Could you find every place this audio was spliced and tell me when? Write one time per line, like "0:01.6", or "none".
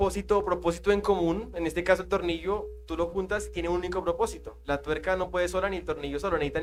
none